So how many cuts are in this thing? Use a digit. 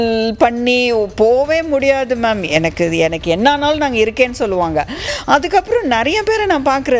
1